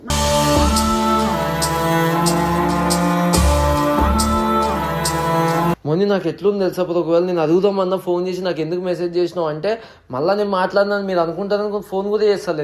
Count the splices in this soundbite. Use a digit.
1